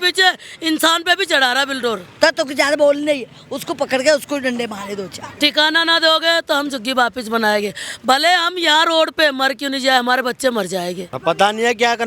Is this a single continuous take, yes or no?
no